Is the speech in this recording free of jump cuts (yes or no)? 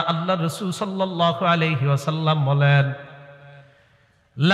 yes